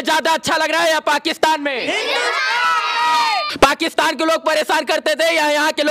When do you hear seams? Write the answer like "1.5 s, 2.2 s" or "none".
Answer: none